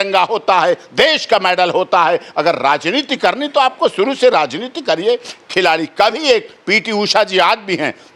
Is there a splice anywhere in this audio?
no; 0 cuts

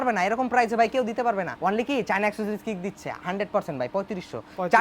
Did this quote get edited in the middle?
no; 0 cuts

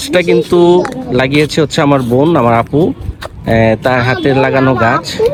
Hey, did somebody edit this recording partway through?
no; 0 cuts

